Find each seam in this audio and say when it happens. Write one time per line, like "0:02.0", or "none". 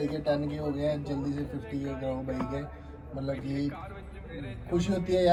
none